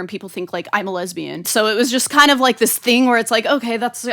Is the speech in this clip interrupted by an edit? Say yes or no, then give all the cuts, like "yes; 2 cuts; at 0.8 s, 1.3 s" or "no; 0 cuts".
yes; 1 cut; at 1.4 s